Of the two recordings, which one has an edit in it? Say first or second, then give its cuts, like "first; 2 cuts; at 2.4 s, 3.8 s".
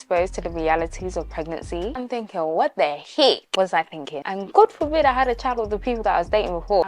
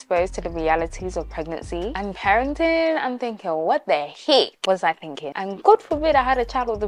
first; 1 cut; at 2.0 s